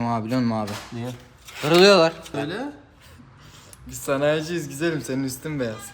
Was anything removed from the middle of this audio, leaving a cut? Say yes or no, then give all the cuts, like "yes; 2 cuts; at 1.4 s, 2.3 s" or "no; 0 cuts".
yes; 1 cut; at 2.3 s